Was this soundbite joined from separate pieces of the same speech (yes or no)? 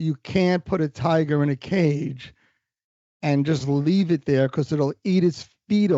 no